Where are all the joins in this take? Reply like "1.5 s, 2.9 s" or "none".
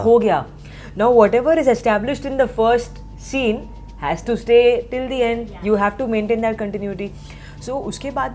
none